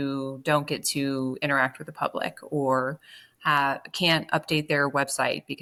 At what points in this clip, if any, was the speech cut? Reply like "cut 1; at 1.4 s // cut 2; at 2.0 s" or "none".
none